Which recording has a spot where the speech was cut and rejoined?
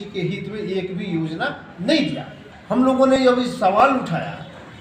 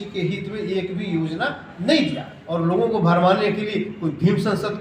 second; 1 cut; at 2.6 s

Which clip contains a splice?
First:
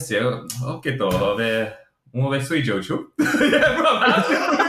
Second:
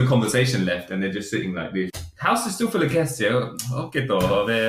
second; 1 cut; at 2.0 s

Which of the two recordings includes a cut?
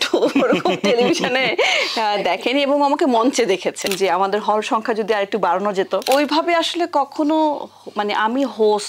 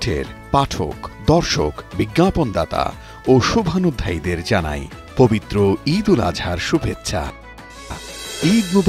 first; 2 cuts; at 3.9 s, 6.0 s

